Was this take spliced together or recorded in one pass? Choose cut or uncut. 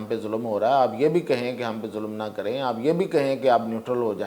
uncut